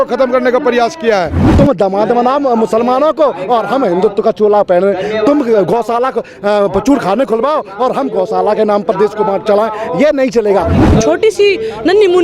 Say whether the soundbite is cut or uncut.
cut